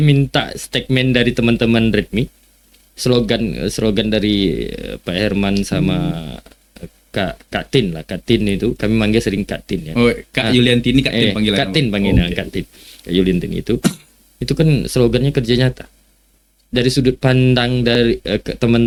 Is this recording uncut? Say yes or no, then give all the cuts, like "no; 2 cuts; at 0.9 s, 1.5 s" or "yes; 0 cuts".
yes; 0 cuts